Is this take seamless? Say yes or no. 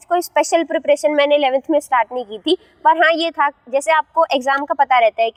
yes